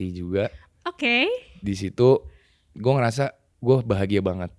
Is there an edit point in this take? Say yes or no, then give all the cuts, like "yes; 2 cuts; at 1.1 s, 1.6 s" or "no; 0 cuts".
yes; 1 cut; at 3.5 s